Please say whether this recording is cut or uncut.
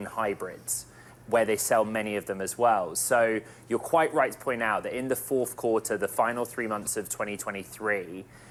uncut